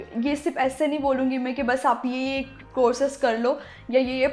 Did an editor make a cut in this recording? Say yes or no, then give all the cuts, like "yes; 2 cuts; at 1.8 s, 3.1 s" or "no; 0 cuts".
no; 0 cuts